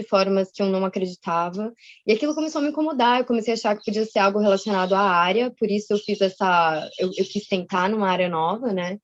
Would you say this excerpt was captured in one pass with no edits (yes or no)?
yes